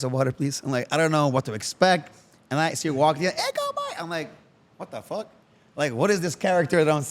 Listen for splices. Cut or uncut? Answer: uncut